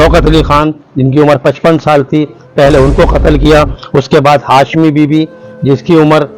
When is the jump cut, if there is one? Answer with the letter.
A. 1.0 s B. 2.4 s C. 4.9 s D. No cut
D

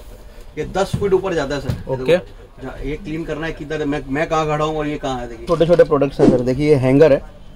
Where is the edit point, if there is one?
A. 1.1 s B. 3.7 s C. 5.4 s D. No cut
C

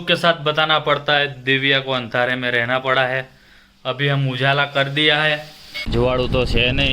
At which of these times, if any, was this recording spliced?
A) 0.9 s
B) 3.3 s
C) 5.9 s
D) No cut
C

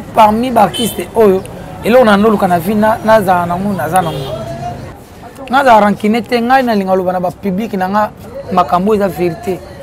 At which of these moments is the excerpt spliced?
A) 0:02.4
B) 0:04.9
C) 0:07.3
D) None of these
B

